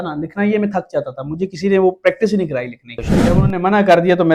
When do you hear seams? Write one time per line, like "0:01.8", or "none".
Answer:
0:03.4